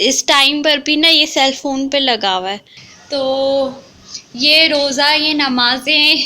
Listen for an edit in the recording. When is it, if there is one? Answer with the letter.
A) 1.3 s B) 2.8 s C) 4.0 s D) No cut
B